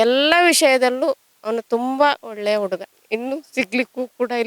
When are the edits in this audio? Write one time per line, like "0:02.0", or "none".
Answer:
0:02.9